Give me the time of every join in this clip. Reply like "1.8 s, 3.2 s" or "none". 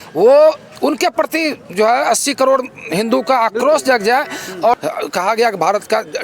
4.8 s